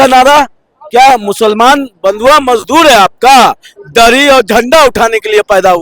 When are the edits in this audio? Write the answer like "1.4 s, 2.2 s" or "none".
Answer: none

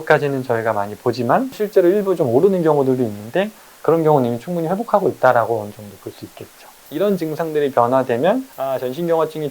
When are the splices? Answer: 1.5 s, 6.8 s, 8.6 s

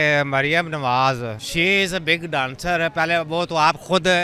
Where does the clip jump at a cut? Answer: 1.4 s

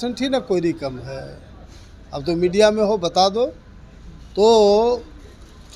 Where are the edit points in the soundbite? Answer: none

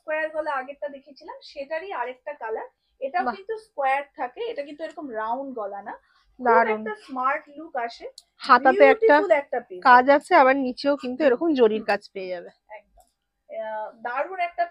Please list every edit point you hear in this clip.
none

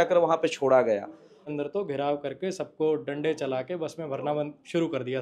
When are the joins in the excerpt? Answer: 1.4 s

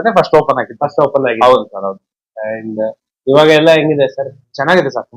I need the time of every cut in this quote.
none

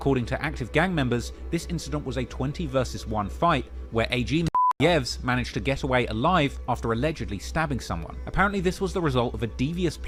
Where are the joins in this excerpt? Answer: none

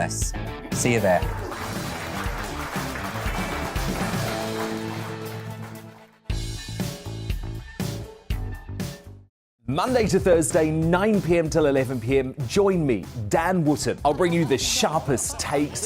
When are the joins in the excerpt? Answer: 9.4 s

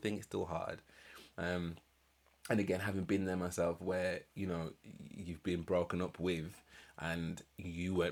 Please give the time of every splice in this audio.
none

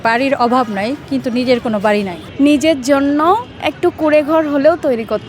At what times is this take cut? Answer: 2.2 s

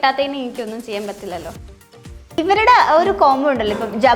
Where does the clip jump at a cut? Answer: 1.9 s

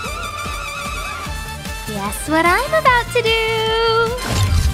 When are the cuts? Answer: none

